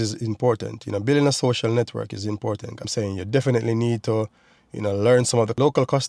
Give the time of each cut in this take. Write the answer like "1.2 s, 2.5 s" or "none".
3.1 s